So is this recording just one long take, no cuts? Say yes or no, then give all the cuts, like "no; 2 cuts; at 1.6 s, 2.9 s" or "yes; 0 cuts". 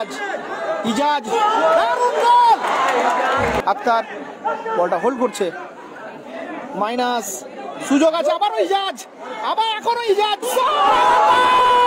no; 1 cut; at 3.6 s